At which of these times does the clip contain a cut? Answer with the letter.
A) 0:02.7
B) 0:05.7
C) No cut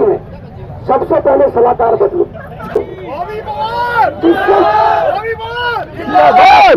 A